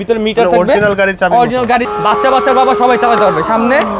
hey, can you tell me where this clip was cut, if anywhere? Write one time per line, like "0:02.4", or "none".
0:01.9

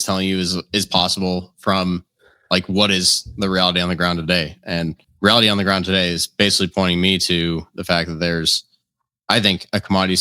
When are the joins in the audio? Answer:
0:05.0

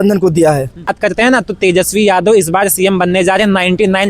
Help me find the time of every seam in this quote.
0:00.9

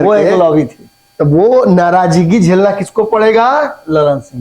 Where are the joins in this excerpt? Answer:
none

